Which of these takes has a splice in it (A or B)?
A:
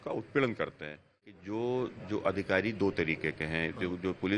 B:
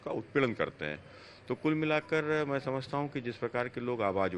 A